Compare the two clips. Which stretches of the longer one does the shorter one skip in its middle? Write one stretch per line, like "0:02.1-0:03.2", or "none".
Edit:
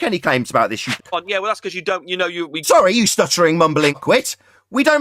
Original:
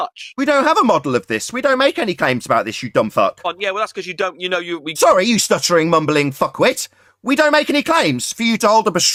0:02.9-0:03.3
0:06.3-0:06.5